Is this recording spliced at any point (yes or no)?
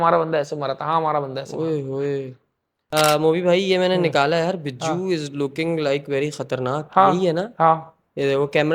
yes